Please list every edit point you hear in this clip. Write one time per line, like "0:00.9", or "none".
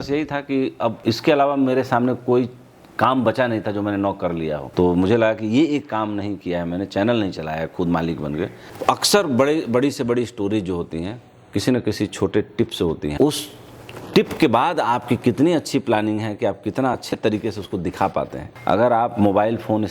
0:01.0
0:04.7
0:08.6
0:13.1
0:18.4